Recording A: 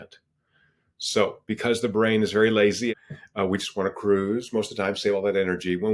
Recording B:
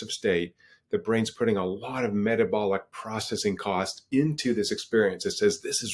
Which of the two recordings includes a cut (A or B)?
A